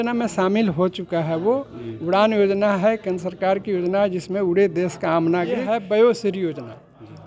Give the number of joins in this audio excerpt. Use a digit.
1